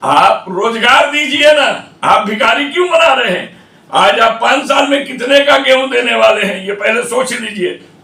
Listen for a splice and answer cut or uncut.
uncut